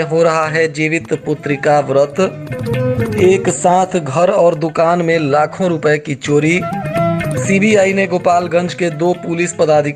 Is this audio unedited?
yes; 0 cuts

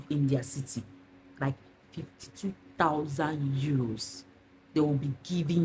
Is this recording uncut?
yes; 0 cuts

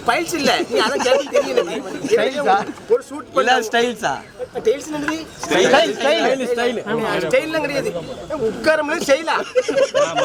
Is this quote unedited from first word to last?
yes; 0 cuts

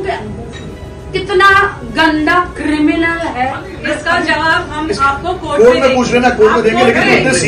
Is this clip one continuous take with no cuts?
no; 1 cut; at 3.7 s

